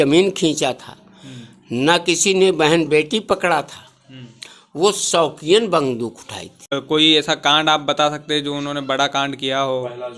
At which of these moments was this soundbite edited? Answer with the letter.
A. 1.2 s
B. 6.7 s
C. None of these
B